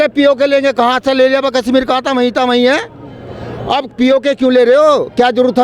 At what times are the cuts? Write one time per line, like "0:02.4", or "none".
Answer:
none